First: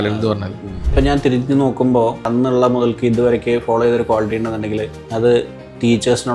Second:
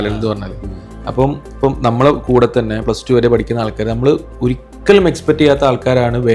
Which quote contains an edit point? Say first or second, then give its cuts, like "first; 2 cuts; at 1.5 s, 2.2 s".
first; 3 cuts; at 0.9 s, 2.3 s, 5.0 s